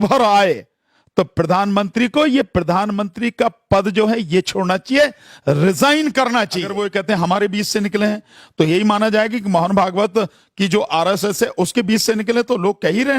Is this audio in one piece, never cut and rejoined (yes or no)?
no